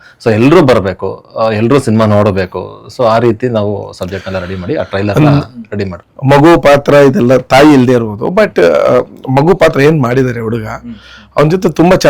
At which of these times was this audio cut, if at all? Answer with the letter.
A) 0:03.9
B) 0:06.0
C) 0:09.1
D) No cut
B